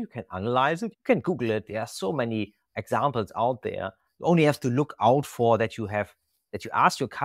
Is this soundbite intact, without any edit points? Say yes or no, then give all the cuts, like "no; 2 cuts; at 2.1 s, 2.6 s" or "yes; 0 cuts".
no; 1 cut; at 1.0 s